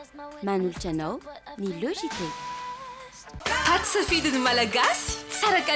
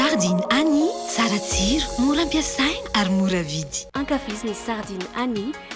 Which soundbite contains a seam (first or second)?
first